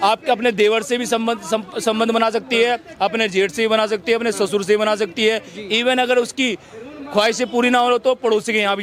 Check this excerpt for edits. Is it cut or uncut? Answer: uncut